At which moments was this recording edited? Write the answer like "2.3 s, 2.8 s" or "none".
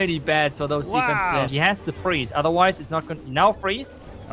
1.5 s